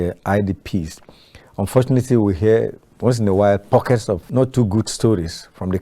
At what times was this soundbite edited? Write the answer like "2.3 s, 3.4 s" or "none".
4.2 s